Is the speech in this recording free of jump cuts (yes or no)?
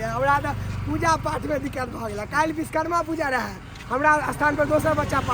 yes